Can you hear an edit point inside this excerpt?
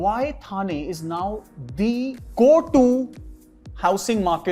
no; 0 cuts

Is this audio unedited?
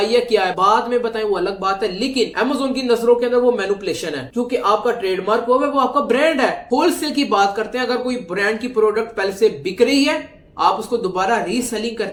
yes; 0 cuts

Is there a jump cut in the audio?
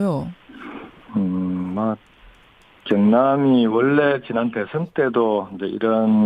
no; 0 cuts

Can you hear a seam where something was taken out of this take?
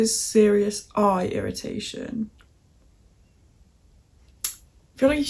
no; 0 cuts

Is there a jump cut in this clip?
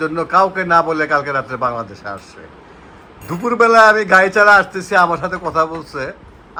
no; 0 cuts

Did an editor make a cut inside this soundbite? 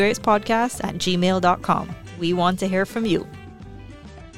yes; 1 cut; at 3.3 s

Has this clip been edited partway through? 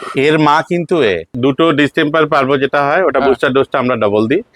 yes; 1 cut; at 1.3 s

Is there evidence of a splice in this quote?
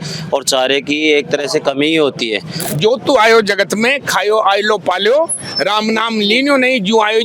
yes; 1 cut; at 2.6 s

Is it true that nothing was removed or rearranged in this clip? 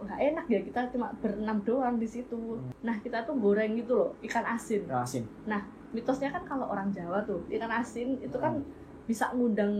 no; 2 cuts; at 2.6 s, 7.5 s

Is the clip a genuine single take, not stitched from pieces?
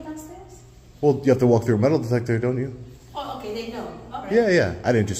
yes; 0 cuts

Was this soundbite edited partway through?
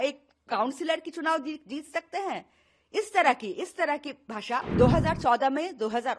yes; 1 cut; at 4.7 s

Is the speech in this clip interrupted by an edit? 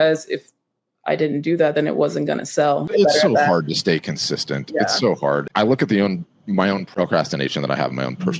yes; 3 cuts; at 2.9 s, 5.5 s, 6.9 s

